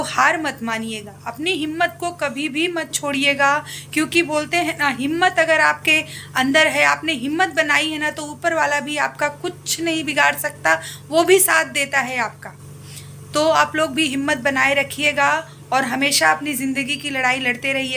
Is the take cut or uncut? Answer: uncut